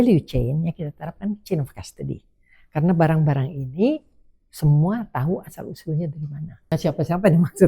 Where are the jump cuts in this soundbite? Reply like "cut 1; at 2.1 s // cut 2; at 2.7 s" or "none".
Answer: cut 1; at 6.8 s